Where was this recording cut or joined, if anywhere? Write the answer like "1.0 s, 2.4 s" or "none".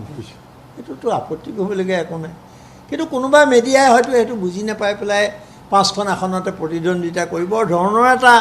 none